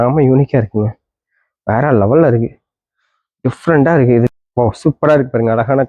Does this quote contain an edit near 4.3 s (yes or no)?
yes